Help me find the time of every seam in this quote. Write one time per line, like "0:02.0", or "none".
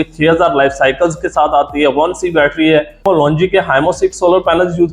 0:03.0